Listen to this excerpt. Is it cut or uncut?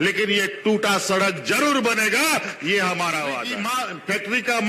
cut